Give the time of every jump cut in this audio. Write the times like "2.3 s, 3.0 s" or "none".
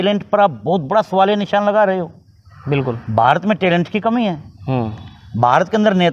none